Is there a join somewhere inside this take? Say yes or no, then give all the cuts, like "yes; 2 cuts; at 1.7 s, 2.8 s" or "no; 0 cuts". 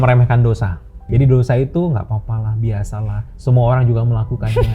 yes; 1 cut; at 1.0 s